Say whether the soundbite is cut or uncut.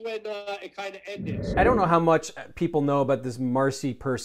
cut